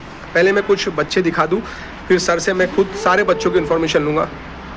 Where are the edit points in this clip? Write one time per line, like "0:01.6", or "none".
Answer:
none